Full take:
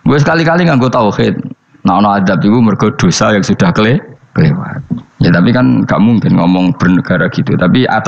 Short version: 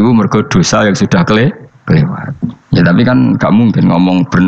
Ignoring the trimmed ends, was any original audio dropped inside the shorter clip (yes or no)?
no